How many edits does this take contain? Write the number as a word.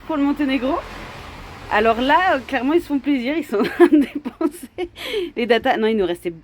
zero